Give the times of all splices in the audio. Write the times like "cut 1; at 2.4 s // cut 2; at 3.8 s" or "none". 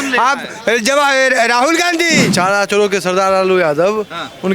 cut 1; at 2.3 s